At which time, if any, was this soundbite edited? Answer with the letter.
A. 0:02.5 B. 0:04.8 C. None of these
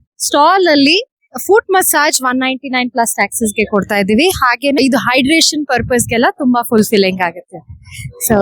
B